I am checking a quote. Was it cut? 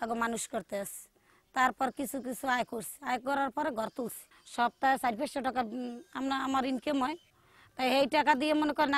no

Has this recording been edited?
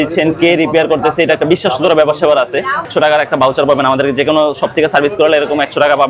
yes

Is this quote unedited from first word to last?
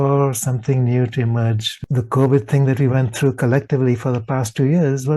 no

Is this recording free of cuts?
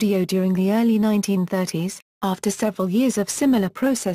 no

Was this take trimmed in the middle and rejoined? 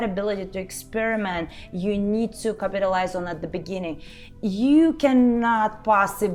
no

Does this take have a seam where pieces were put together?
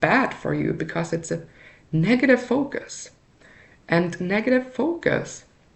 no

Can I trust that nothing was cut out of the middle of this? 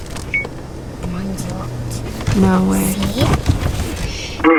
yes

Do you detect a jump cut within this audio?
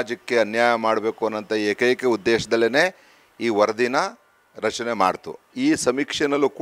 yes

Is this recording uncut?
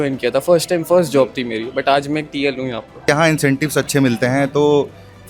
no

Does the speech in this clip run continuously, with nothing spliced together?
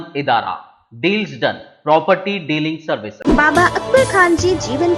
no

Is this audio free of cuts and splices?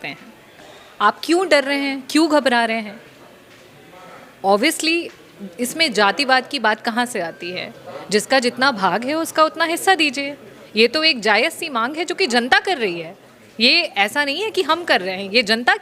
yes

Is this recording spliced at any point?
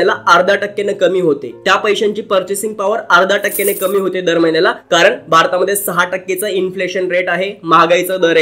no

